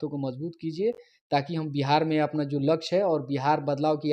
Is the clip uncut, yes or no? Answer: yes